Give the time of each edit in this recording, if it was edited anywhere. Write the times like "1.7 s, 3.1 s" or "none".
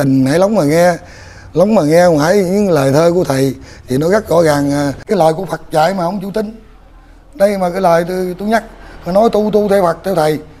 5.0 s